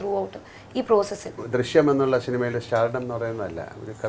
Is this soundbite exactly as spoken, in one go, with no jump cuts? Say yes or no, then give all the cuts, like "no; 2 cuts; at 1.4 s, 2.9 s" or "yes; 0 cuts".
no; 1 cut; at 1.4 s